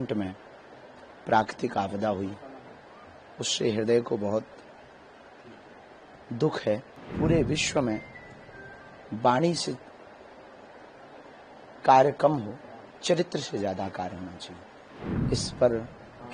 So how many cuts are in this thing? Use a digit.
2